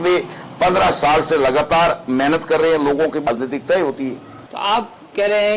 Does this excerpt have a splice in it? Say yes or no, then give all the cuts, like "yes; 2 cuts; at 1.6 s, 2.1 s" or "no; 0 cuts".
yes; 1 cut; at 3.3 s